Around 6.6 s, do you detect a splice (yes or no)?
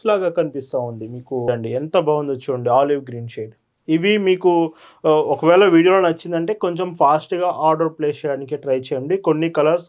no